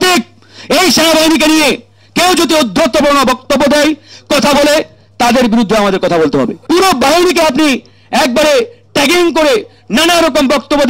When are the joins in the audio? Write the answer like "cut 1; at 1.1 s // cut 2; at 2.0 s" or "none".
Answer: cut 1; at 6.6 s